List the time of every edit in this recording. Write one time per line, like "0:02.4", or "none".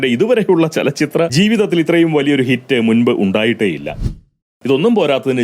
0:01.3
0:03.9